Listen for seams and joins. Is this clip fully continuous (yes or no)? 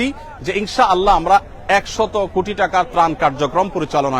yes